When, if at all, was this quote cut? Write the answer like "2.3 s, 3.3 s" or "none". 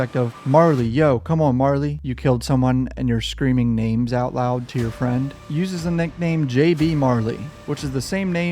2.1 s, 5.4 s